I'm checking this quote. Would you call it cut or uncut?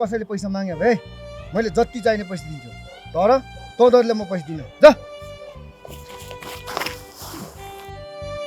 uncut